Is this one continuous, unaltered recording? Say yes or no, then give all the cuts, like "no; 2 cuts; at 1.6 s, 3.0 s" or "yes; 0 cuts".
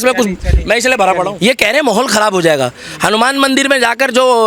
no; 1 cut; at 1.3 s